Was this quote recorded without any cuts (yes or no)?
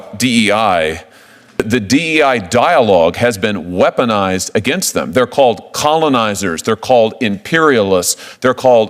no